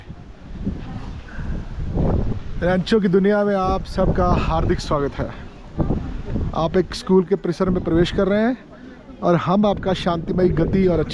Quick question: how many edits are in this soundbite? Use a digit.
0